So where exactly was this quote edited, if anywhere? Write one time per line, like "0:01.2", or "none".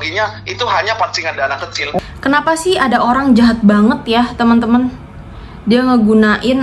0:02.0